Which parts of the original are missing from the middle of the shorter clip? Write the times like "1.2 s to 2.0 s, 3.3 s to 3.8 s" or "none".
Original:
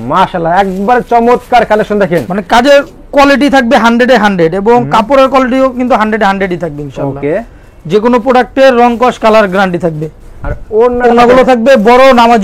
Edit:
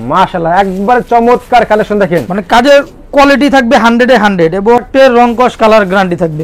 4.9 s to 8.5 s